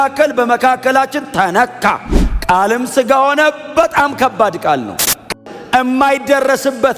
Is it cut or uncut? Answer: cut